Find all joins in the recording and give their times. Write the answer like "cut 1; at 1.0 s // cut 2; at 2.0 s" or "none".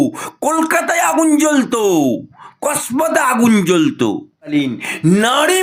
cut 1; at 4.5 s